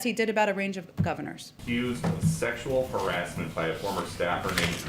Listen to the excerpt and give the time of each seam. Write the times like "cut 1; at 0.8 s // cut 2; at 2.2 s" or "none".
cut 1; at 1.6 s